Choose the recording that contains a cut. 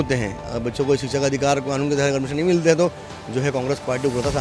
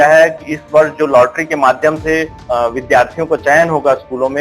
second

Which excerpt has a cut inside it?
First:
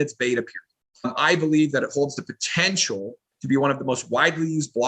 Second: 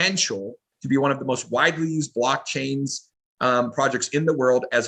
first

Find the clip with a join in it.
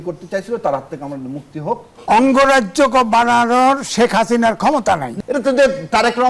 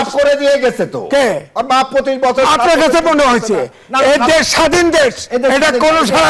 first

